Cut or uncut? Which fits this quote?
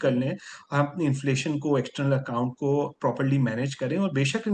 uncut